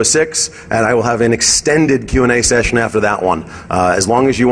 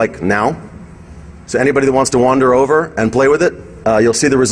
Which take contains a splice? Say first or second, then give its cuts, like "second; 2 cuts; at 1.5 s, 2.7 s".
first; 1 cut; at 1.9 s